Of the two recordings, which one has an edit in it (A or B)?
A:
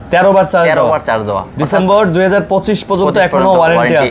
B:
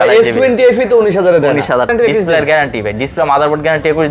B